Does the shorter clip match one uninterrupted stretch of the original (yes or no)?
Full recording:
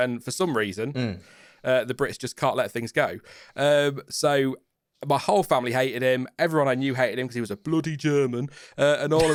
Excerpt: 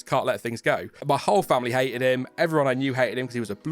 no